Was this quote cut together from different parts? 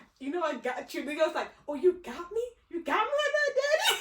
no; 0 cuts

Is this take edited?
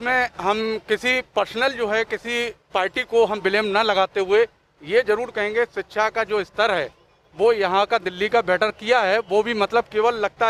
no; 0 cuts

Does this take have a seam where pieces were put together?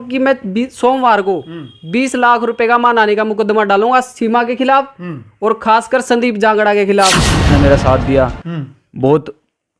yes; 1 cut; at 7.5 s

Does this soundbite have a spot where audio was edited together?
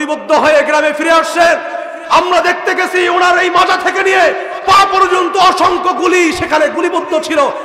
no; 0 cuts

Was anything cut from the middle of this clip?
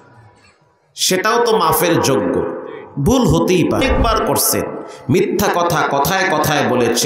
yes; 1 cut; at 3.8 s

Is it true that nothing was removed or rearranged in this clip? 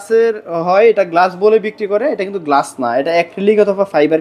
yes; 0 cuts

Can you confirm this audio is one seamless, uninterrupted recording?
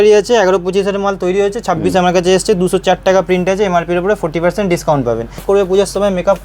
no; 1 cut; at 5.4 s

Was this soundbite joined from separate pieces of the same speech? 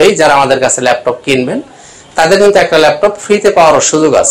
no; 0 cuts

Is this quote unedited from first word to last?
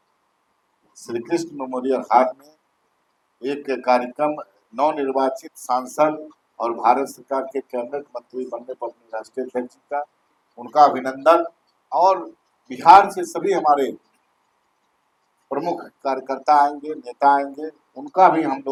yes; 0 cuts

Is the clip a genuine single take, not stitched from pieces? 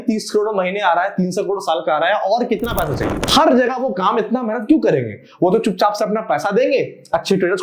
no; 1 cut; at 3.2 s

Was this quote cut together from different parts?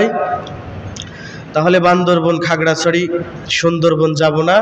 no; 0 cuts

